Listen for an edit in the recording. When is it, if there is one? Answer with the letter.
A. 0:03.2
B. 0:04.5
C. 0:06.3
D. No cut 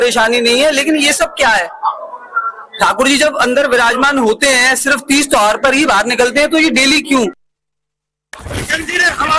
A